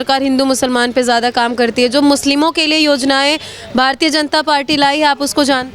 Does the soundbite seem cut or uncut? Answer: uncut